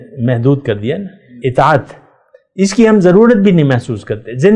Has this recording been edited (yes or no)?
no